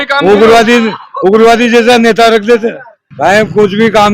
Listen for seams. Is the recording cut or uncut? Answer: cut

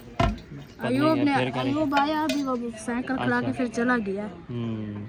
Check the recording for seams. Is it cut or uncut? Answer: uncut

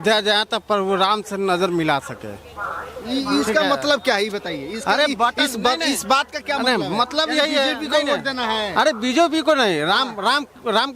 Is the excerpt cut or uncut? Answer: uncut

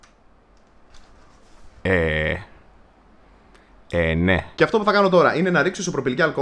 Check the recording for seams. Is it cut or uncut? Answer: cut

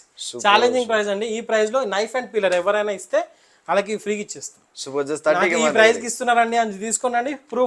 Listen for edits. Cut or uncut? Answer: uncut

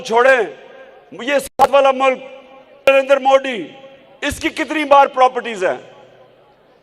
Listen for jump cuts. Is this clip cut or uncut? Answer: cut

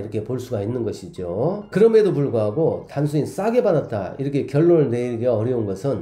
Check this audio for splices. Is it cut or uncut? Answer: uncut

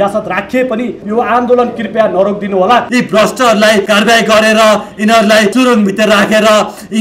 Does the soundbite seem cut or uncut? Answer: cut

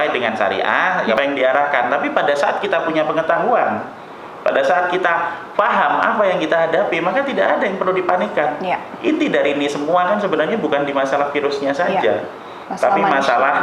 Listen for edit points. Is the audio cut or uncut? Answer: cut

